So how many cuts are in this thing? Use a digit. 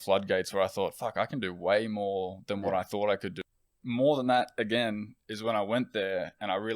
1